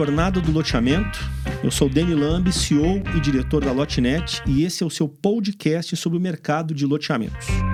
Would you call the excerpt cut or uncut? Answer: uncut